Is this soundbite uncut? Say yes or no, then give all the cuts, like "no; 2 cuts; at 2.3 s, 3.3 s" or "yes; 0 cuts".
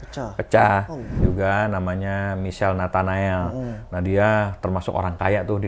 no; 1 cut; at 1.2 s